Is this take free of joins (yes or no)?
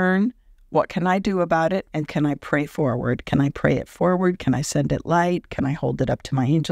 no